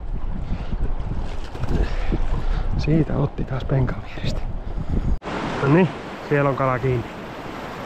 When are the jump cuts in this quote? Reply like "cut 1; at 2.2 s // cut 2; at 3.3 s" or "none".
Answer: cut 1; at 5.7 s